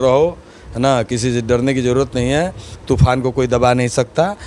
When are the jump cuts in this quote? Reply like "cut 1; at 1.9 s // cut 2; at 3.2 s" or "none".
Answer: none